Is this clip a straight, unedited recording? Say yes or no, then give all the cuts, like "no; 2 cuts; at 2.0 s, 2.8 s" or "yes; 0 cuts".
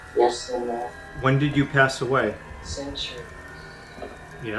no; 1 cut; at 2.5 s